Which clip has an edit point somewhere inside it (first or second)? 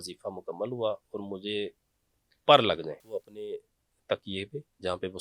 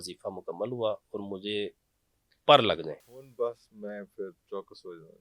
first